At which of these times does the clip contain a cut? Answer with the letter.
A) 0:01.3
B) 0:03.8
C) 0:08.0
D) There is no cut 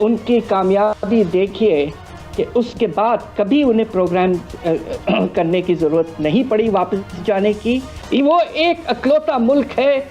C